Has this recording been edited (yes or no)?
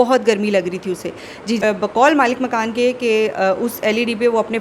yes